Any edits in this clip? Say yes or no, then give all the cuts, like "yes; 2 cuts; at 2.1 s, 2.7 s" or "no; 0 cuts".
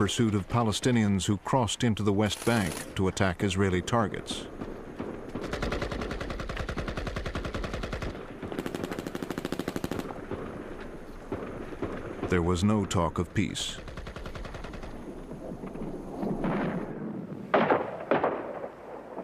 yes; 1 cut; at 8.6 s